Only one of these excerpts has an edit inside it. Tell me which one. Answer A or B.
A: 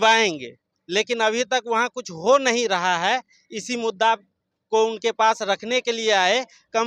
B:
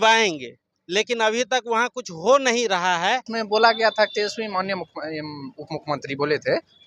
B